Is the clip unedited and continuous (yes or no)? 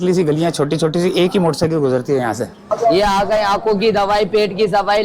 no